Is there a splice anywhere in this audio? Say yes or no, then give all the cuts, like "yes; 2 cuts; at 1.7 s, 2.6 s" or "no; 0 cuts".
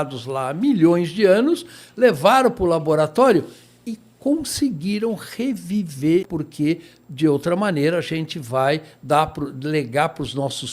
yes; 1 cut; at 6.3 s